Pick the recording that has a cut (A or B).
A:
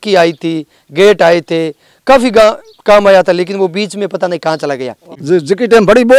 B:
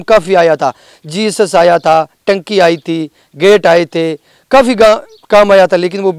A